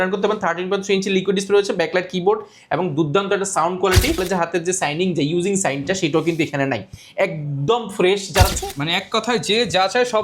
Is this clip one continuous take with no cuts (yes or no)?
no